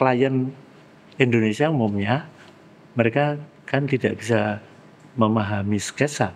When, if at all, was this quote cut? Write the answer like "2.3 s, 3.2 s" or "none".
none